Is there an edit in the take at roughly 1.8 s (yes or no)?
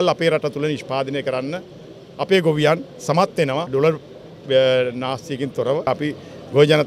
no